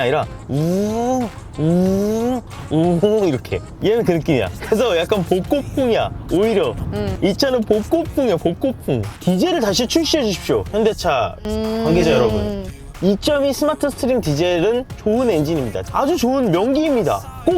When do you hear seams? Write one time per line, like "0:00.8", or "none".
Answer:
0:09.1
0:14.9
0:15.8